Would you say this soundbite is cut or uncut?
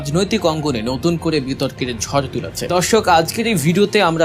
cut